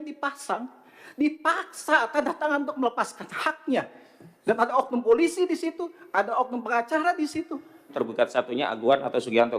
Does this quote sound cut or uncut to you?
cut